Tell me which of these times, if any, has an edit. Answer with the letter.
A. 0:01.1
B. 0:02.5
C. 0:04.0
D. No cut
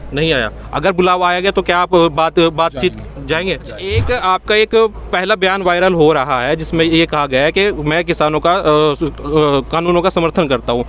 C